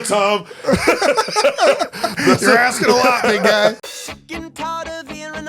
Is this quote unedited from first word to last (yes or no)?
no